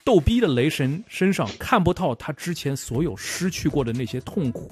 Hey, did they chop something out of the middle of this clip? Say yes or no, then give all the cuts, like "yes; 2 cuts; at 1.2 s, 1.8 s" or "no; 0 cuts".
no; 0 cuts